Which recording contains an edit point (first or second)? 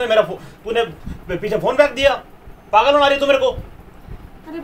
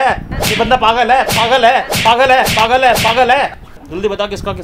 second